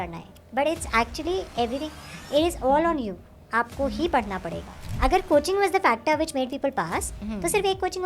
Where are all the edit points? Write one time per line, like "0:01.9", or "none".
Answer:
0:04.8